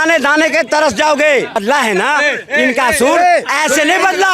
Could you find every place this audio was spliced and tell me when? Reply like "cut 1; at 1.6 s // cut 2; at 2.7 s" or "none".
cut 1; at 1.6 s